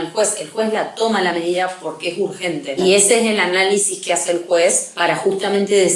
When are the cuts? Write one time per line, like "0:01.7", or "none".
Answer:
0:02.8
0:04.9